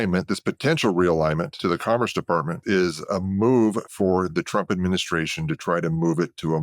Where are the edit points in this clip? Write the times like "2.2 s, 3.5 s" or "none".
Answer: 1.5 s, 2.5 s

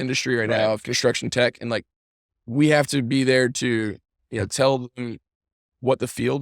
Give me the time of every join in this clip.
2.4 s

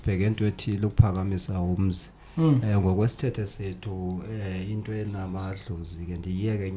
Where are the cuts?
none

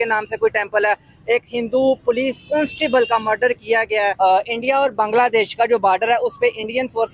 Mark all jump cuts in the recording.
4.1 s

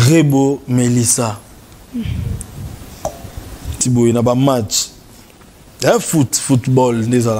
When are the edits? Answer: 3.8 s

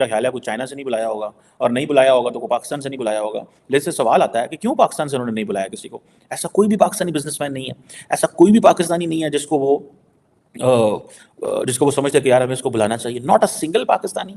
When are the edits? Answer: none

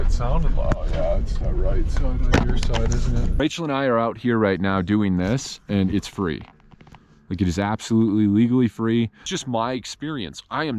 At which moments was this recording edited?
3.4 s, 9.3 s

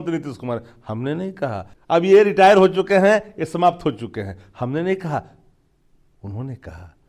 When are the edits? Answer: 1.7 s

